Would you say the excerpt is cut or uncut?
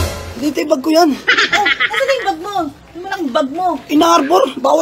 uncut